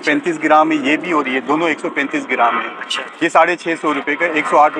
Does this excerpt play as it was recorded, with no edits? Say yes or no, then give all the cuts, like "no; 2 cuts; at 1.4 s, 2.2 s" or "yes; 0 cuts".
yes; 0 cuts